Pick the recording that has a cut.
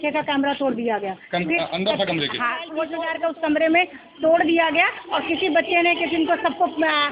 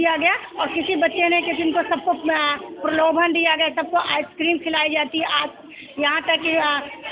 first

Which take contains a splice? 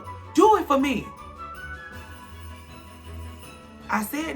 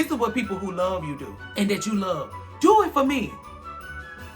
second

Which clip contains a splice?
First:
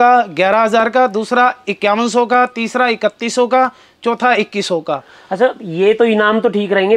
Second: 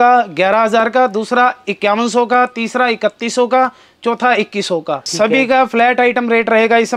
second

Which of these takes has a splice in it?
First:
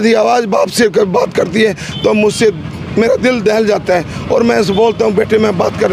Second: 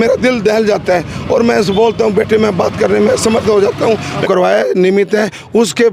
second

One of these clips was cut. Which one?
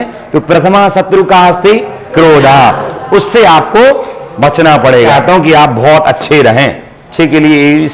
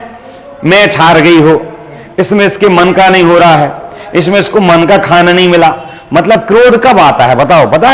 first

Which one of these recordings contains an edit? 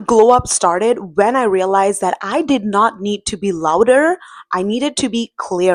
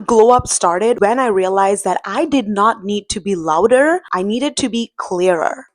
second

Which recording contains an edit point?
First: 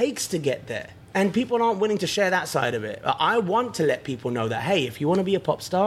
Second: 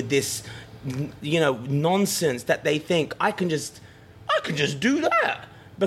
first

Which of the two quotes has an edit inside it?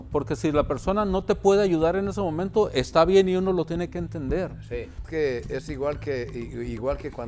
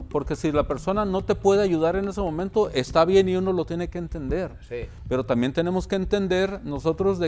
first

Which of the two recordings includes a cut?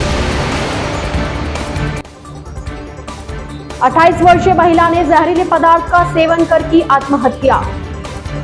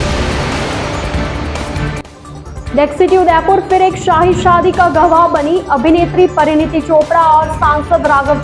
second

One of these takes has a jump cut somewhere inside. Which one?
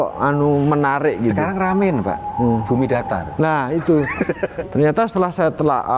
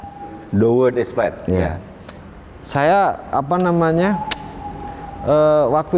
first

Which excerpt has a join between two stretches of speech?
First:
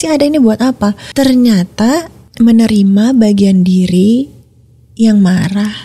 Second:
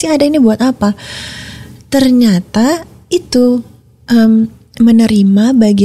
first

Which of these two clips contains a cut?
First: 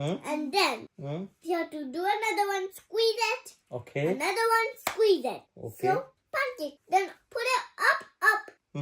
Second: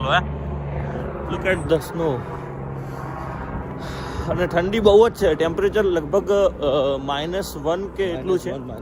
first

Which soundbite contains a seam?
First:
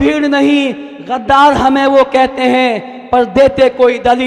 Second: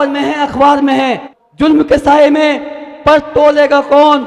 second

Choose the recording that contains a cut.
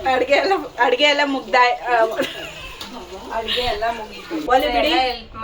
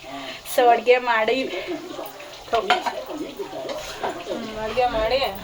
first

